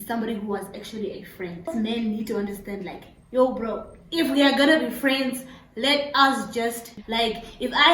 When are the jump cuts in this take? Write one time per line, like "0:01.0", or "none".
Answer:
0:01.7
0:06.9